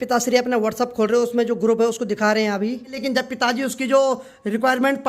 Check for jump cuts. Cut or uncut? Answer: cut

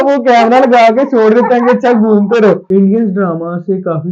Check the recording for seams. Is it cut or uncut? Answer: cut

